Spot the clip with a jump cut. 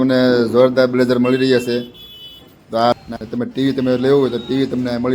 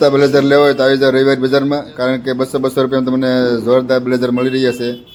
first; 1 cut; at 2.9 s

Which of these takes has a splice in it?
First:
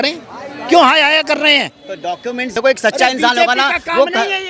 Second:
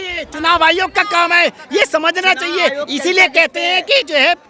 first; 1 cut; at 2.6 s

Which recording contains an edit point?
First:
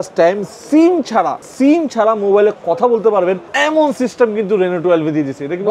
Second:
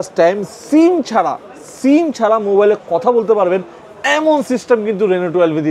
first; 2 cuts; at 1.4 s, 3.5 s

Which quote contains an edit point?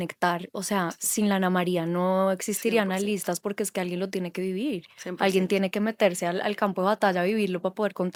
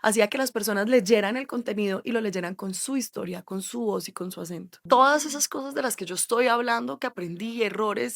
second; 1 cut; at 4.8 s

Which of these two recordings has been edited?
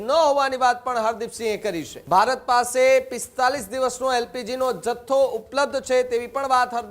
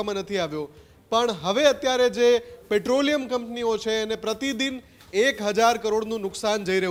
first; 1 cut; at 1.9 s

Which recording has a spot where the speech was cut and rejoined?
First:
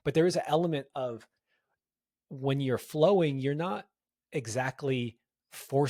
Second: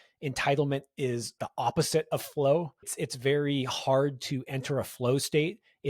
second; 2 cuts; at 1.4 s, 2.9 s

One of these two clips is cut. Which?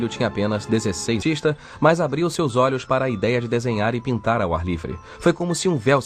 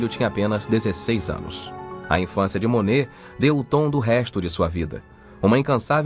second; 1 cut; at 1.2 s

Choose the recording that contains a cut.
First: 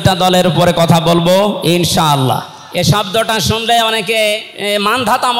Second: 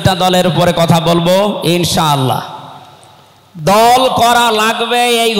first; 2 cuts; at 2.6 s, 4.5 s

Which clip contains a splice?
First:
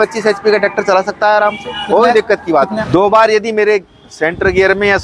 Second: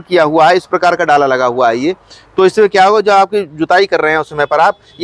first; 1 cut; at 2.7 s

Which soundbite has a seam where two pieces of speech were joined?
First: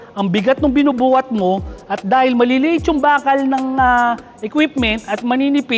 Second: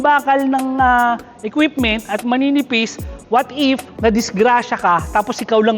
second; 1 cut; at 3.9 s

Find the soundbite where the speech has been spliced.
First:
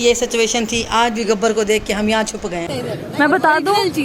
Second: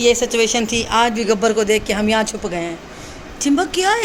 first; 1 cut; at 2.7 s

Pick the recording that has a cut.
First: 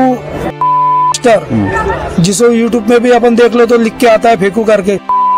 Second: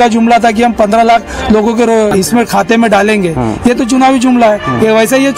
second; 1 cut; at 2.1 s

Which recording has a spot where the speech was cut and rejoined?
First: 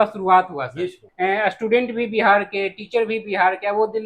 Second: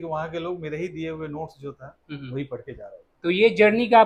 first; 1 cut; at 1.0 s

